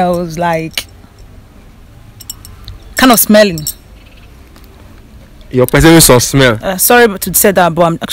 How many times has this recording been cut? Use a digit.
0